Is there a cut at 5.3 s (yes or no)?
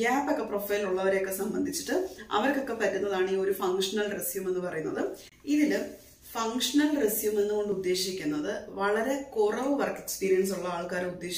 yes